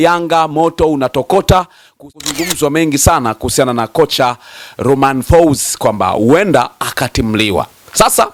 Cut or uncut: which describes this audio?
cut